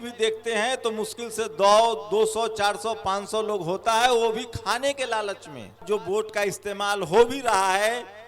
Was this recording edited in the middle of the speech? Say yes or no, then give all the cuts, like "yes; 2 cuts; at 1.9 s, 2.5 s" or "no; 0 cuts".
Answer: yes; 1 cut; at 5.8 s